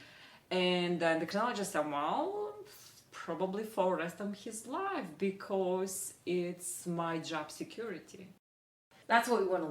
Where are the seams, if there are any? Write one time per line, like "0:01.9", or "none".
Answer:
0:08.8